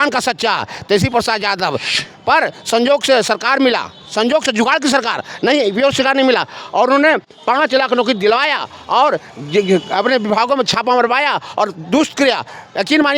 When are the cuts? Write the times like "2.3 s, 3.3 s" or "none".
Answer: 1.9 s